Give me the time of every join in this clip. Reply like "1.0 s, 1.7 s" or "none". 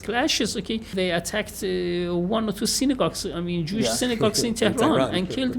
0.9 s